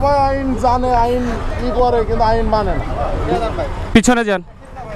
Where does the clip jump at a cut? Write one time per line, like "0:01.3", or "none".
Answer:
none